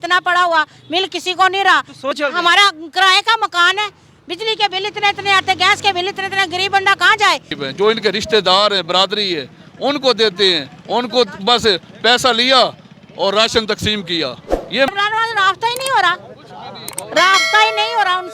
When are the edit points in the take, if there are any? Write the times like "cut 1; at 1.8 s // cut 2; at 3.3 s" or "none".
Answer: cut 1; at 2.1 s // cut 2; at 7.6 s // cut 3; at 14.9 s